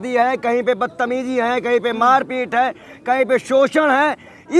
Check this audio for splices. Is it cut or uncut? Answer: uncut